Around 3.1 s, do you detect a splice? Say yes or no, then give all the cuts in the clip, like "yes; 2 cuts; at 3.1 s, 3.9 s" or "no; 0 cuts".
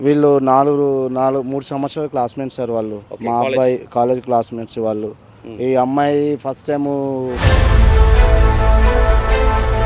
yes; 2 cuts; at 3.1 s, 7.4 s